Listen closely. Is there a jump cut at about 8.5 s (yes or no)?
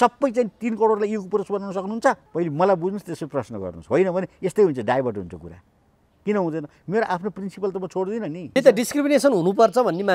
yes